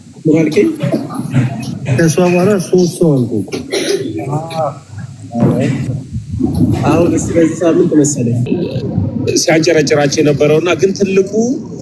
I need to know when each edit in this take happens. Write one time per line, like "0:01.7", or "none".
0:08.5